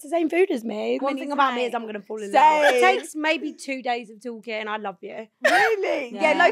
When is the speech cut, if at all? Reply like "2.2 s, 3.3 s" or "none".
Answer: 1.0 s